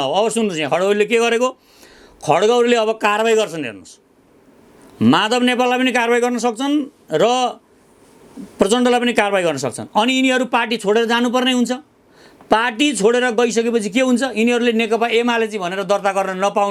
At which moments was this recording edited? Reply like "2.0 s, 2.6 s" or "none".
none